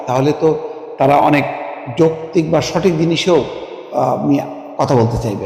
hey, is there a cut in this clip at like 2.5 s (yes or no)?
no